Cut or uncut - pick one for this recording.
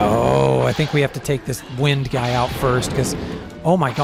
uncut